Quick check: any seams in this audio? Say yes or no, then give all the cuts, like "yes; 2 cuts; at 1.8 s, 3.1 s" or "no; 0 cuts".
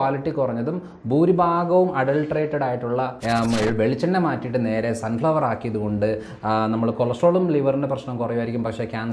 yes; 1 cut; at 3.2 s